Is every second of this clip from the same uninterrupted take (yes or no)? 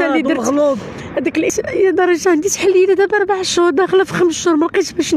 no